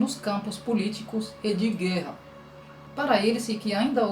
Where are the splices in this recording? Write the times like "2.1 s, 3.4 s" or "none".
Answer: 2.8 s